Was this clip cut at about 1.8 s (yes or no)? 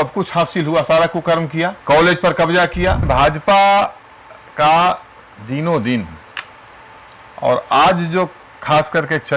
yes